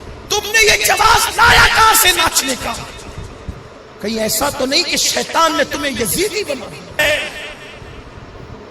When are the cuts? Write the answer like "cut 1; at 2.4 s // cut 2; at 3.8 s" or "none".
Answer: cut 1; at 7.0 s